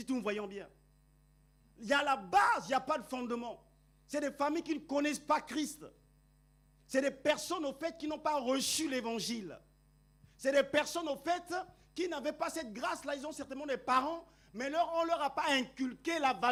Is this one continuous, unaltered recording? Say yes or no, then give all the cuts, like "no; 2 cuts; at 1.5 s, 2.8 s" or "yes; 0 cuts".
yes; 0 cuts